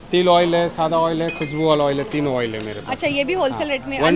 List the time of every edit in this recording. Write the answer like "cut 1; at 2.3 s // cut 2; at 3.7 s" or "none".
none